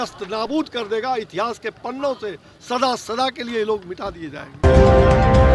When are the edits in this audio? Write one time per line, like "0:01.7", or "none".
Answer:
0:04.6